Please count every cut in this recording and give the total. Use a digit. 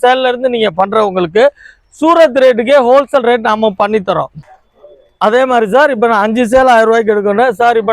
1